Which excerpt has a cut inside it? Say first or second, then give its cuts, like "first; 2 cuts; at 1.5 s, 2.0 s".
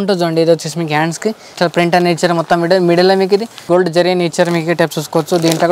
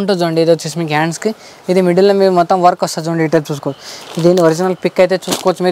first; 2 cuts; at 1.5 s, 3.5 s